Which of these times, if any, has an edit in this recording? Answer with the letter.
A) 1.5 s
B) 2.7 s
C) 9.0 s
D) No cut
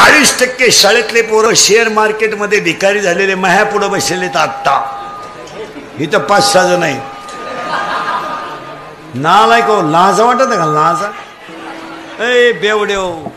A